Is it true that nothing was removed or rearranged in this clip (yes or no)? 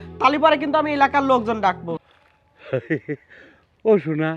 no